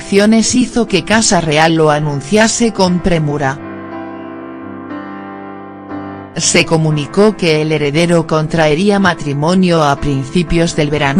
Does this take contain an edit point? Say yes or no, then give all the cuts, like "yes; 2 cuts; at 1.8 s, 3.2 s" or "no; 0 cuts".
no; 0 cuts